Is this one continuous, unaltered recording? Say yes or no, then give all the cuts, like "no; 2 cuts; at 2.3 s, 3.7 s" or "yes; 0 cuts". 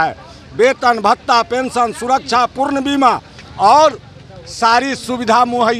yes; 0 cuts